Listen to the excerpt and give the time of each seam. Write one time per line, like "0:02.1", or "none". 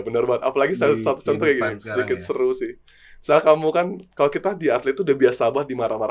none

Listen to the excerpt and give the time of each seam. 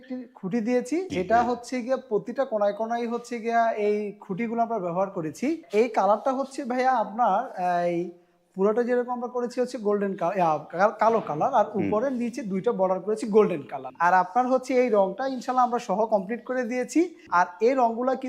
0:01.1
0:05.6
0:13.8
0:17.2

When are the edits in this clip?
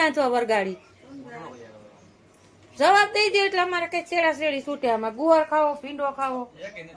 none

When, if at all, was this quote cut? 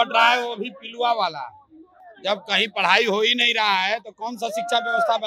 none

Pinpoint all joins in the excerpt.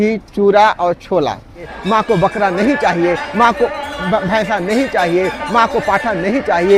0:01.7

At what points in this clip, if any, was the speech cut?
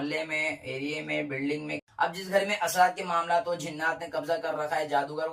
0:01.7

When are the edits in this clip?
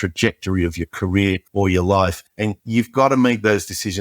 0:01.4
0:02.3

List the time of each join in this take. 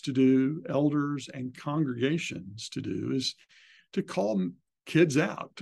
0:04.7

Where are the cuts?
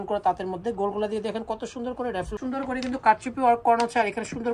0:02.4

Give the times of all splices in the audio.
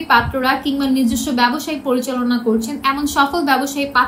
none

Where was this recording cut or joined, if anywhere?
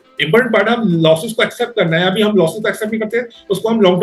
none

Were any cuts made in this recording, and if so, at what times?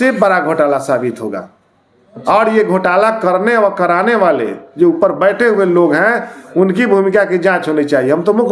none

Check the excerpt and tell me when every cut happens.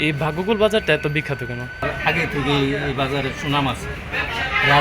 0:01.8

